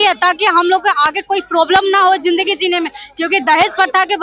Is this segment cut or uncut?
uncut